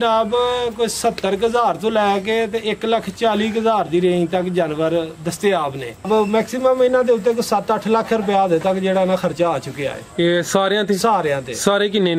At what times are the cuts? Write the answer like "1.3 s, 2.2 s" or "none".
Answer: 6.1 s